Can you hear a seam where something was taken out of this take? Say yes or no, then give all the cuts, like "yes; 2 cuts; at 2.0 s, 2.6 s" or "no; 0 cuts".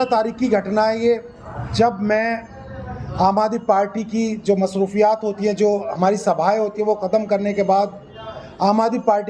no; 0 cuts